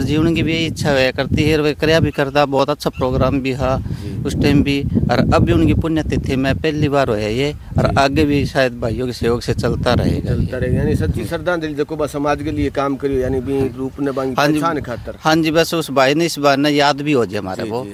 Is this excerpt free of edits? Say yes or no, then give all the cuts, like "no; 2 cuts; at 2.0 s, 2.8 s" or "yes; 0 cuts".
yes; 0 cuts